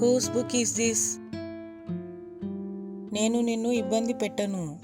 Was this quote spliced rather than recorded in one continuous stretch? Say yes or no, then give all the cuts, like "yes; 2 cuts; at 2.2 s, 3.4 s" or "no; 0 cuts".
yes; 2 cuts; at 1.3 s, 3.1 s